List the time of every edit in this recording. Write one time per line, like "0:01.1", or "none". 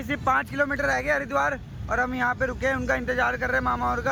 none